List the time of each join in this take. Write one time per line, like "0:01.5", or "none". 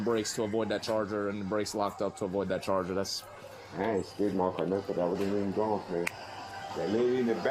0:03.6